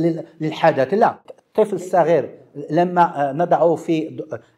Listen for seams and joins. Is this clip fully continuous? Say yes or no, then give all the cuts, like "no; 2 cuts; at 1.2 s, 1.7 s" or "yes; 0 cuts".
no; 1 cut; at 1.2 s